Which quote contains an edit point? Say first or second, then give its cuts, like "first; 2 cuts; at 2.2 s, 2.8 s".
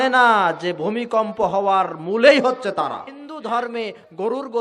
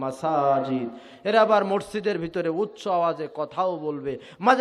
first; 1 cut; at 3.3 s